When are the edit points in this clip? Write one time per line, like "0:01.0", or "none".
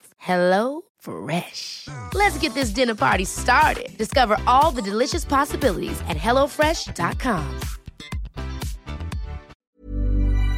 0:09.6